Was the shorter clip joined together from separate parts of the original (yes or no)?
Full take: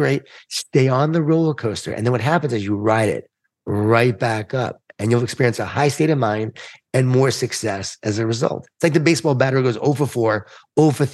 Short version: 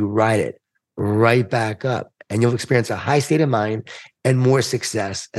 no